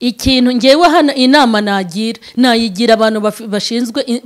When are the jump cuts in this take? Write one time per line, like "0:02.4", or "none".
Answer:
none

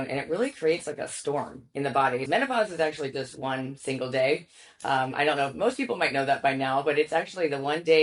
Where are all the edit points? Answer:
0:02.2

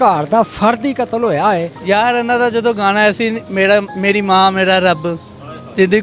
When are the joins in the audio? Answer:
0:01.7

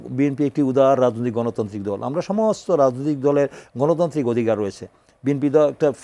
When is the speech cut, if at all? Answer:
none

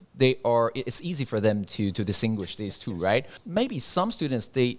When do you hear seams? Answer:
0:03.4

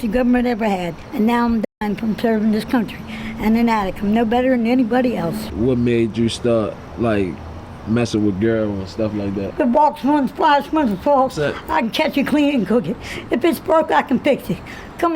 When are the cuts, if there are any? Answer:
0:01.0
0:05.5
0:06.8
0:09.4

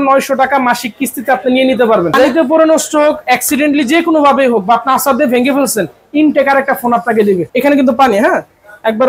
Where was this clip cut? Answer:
0:02.2
0:07.5

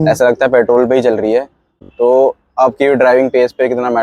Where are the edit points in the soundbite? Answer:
0:01.8

